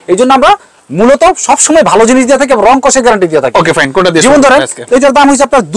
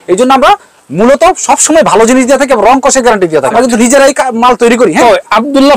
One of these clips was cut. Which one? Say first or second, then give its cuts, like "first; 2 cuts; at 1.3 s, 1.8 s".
second; 1 cut; at 3.5 s